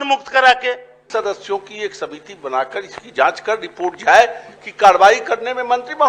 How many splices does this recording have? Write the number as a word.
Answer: one